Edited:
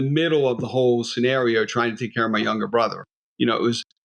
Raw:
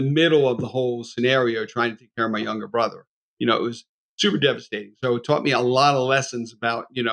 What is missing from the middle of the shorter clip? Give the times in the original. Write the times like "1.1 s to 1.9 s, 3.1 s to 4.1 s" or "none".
none